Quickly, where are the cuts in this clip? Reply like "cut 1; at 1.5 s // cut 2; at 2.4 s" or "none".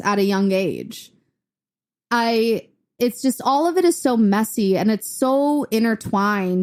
none